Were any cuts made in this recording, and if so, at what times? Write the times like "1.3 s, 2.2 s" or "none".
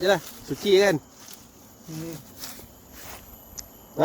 none